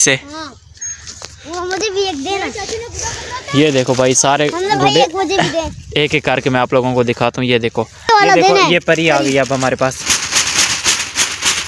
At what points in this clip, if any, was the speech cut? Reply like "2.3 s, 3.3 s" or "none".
8.1 s